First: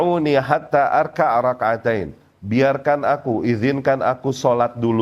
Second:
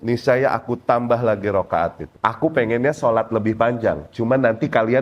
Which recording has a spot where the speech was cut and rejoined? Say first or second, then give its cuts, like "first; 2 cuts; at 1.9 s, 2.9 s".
second; 1 cut; at 2.0 s